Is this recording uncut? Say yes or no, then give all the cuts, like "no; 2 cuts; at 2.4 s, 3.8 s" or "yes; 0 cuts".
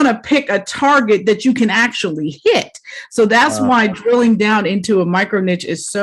yes; 0 cuts